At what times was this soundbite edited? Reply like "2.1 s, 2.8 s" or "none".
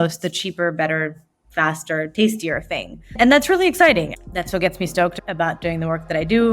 4.1 s, 5.2 s